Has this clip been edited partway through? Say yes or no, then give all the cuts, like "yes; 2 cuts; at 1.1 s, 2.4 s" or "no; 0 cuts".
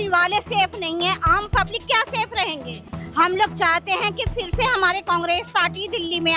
no; 0 cuts